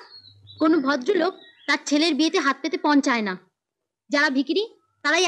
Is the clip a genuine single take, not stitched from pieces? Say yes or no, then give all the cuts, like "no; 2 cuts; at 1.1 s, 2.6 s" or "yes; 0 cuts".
yes; 0 cuts